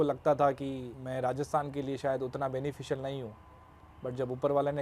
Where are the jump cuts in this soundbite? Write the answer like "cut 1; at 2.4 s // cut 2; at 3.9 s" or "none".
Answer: cut 1; at 0.9 s

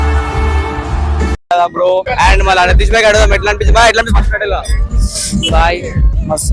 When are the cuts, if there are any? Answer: cut 1; at 2.1 s

